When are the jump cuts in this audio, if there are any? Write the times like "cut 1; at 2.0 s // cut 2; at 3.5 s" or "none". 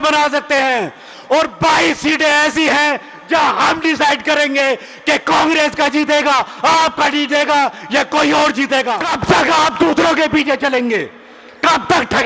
cut 1; at 9.1 s